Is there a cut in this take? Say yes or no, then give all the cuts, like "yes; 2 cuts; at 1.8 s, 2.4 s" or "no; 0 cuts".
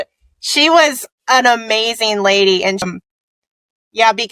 yes; 1 cut; at 2.9 s